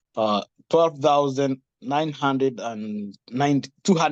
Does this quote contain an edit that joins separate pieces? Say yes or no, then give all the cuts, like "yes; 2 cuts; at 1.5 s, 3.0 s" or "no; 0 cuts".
no; 0 cuts